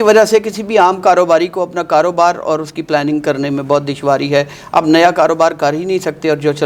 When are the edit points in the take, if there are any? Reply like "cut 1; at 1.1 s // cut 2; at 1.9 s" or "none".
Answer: none